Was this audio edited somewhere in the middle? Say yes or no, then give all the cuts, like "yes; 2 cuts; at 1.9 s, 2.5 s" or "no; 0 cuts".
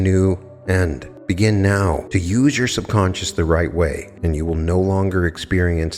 yes; 3 cuts; at 1.1 s, 2.0 s, 4.1 s